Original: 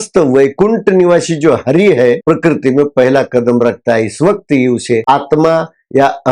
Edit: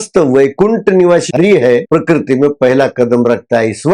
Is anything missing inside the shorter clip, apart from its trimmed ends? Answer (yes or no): yes